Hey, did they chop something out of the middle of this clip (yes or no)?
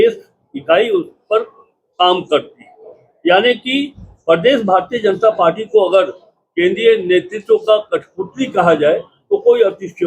no